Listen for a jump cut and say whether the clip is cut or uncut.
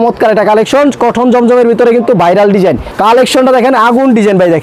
cut